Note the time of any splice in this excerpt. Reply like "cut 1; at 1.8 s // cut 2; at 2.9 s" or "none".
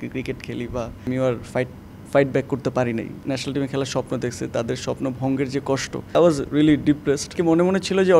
cut 1; at 1.1 s // cut 2; at 3.3 s // cut 3; at 6.1 s // cut 4; at 7.4 s